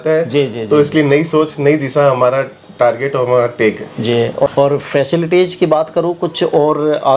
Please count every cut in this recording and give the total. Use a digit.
0